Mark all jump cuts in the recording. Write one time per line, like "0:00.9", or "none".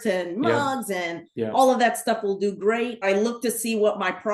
0:03.0